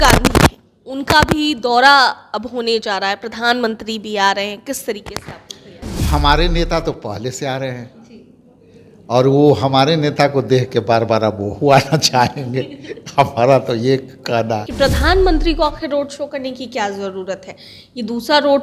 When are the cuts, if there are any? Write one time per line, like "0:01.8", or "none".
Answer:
0:14.7